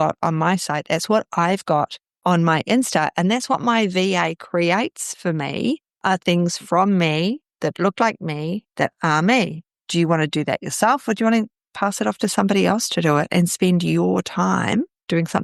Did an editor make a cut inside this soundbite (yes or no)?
no